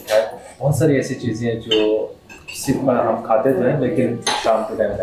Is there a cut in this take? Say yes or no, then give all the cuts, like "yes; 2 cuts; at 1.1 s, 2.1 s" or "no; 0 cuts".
no; 0 cuts